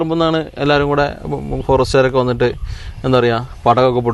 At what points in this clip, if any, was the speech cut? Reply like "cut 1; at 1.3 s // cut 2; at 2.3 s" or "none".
none